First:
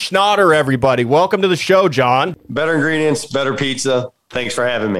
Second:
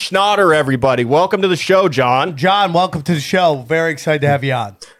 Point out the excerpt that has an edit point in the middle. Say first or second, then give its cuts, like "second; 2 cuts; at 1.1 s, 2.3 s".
first; 1 cut; at 2.3 s